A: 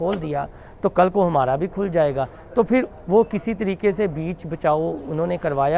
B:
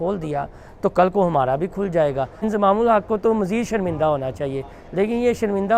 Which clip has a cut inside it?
B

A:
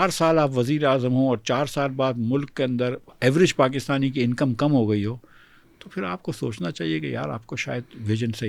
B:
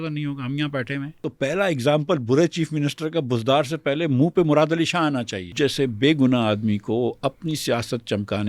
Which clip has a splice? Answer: B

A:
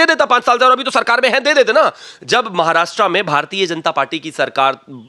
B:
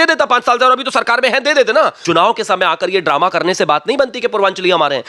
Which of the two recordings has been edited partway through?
B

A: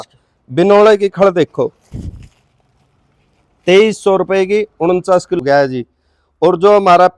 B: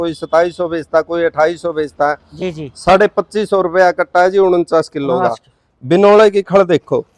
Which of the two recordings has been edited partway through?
A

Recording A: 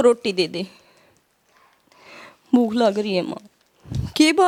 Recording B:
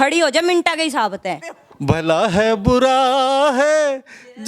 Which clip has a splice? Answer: B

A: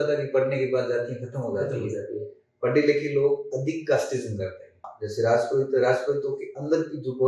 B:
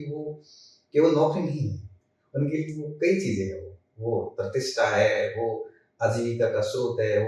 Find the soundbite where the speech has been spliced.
A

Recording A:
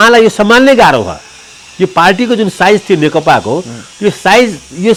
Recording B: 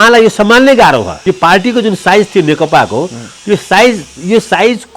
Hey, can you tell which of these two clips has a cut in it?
B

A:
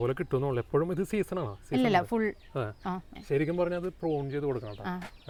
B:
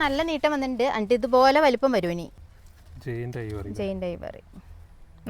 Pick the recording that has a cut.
B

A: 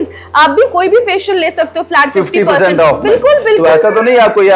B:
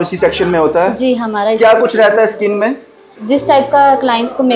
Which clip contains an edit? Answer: B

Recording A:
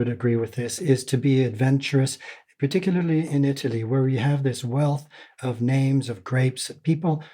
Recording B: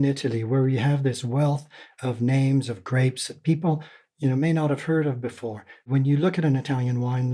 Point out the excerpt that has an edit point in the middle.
B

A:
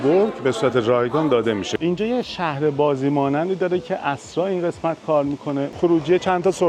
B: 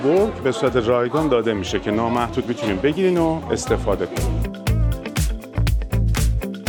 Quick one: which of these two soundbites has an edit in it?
A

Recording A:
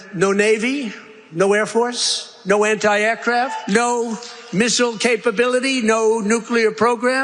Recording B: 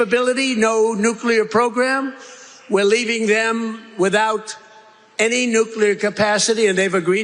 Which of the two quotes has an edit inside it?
A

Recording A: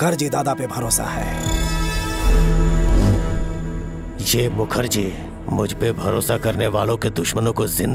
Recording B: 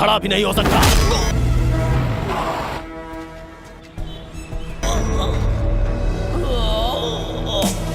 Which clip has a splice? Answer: B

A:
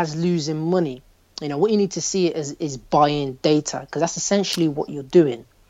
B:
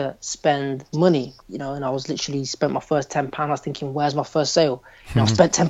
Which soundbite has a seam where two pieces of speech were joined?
B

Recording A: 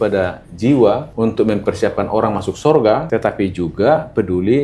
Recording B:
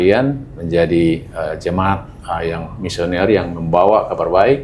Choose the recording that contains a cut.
A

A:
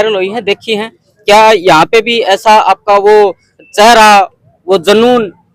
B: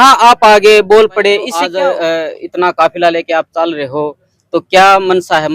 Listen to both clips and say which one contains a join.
B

